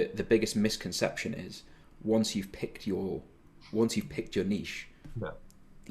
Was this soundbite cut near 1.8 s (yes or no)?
no